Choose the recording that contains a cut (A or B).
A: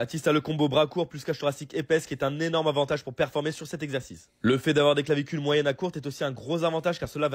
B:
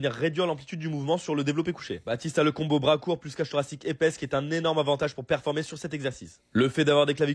B